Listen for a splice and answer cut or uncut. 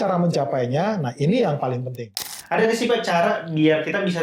cut